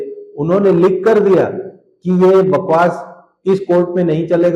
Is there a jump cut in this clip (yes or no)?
no